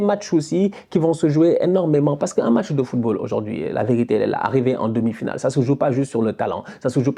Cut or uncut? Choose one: uncut